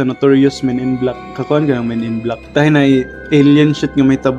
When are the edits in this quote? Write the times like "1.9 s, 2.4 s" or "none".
2.4 s, 3.2 s

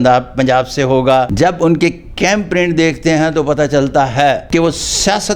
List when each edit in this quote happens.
1.3 s, 4.4 s

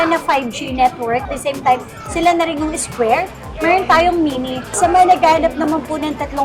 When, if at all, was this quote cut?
1.2 s, 4.7 s

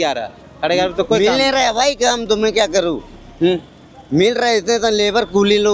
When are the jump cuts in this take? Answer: none

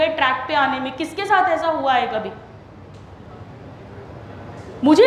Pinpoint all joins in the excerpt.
none

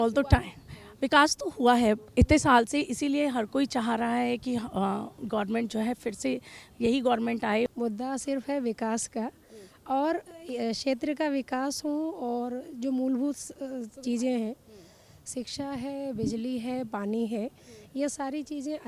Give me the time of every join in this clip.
7.7 s

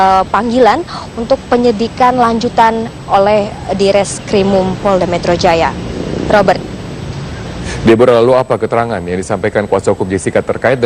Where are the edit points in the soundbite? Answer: 8.6 s

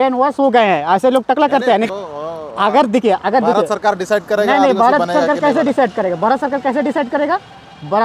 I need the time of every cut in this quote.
1.9 s

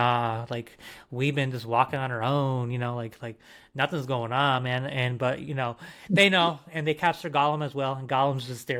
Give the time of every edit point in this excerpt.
none

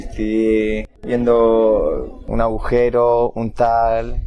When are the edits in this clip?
0.9 s, 2.2 s

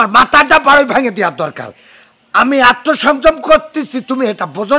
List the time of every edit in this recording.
none

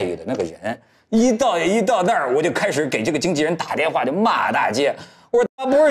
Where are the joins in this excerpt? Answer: 0.9 s

